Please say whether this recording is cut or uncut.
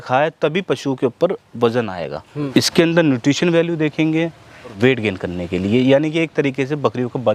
cut